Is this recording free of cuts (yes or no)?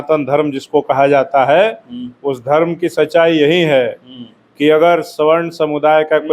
yes